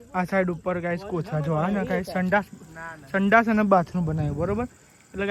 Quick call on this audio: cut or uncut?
uncut